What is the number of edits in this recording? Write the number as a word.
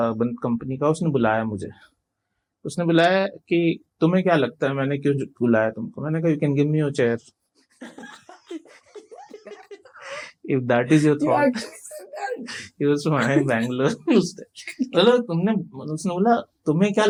zero